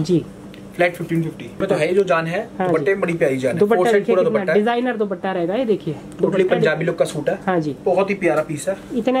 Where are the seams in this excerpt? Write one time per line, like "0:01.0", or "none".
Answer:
0:01.6